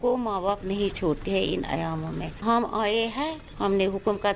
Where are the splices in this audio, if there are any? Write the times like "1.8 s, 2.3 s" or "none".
2.3 s, 3.4 s